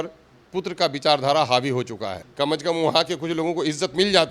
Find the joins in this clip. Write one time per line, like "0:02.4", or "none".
0:02.2

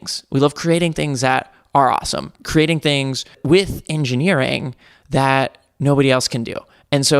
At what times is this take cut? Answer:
0:02.4

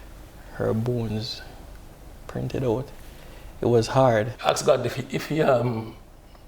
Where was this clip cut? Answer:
0:04.3

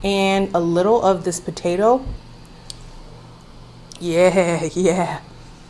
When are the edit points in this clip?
0:02.2

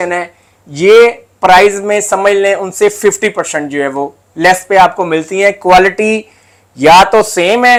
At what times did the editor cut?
none

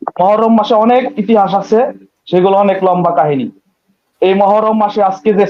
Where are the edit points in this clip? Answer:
none

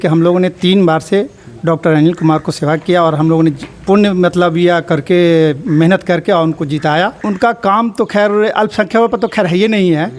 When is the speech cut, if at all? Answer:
0:07.2

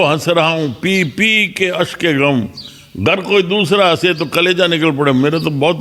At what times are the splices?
none

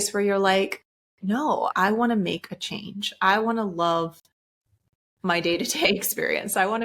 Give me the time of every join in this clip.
0:01.7

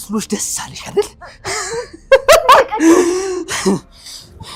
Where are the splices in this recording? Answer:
none

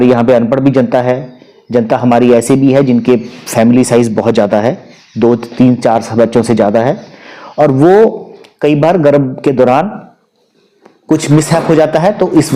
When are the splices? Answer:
none

